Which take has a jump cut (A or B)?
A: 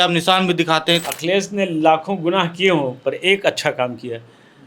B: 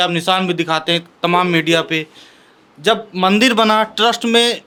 A